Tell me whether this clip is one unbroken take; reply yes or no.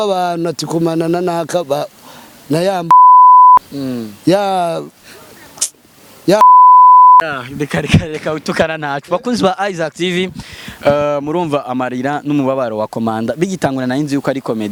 yes